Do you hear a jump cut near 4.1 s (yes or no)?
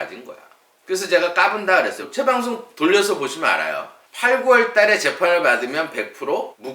no